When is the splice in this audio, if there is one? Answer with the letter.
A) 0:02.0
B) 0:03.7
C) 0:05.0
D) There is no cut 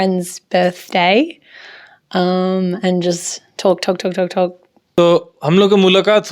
C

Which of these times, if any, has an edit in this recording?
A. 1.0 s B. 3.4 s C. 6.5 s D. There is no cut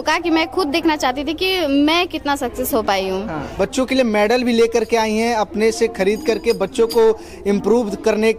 B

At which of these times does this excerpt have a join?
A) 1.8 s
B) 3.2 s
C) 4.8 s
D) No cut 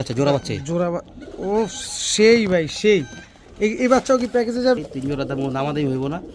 C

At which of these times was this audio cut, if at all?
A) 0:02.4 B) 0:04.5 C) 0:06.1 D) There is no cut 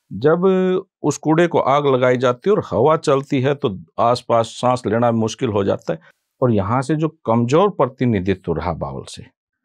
C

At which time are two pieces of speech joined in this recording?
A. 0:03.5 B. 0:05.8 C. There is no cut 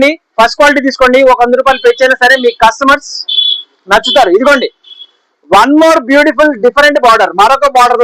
C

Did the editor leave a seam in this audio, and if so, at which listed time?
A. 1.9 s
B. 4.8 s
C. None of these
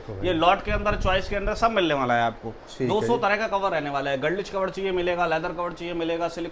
C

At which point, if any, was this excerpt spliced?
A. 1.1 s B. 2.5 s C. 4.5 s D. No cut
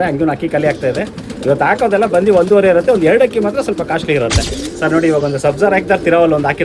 C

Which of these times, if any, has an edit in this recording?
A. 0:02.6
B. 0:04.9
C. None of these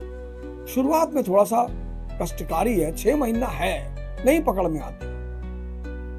B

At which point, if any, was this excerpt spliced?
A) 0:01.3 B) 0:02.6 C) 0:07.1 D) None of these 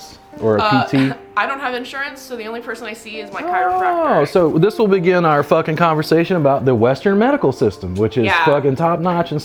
D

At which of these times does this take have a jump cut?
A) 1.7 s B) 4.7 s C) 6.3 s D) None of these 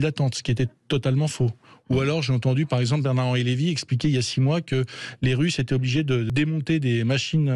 C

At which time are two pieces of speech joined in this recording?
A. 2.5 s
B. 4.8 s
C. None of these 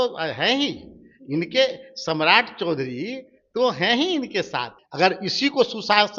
B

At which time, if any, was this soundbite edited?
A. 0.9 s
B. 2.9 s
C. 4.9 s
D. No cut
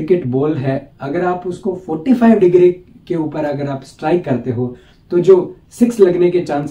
D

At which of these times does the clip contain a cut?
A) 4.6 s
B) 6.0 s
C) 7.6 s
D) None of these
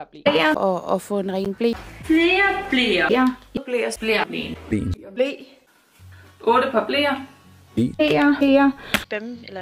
C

